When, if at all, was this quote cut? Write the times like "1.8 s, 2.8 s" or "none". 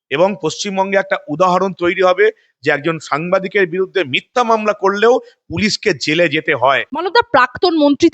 6.9 s